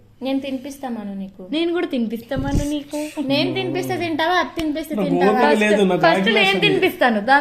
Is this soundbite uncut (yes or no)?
yes